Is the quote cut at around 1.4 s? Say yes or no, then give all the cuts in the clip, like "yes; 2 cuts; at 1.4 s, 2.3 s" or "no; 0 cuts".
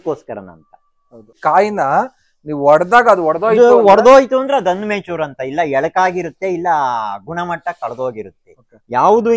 yes; 1 cut; at 1.4 s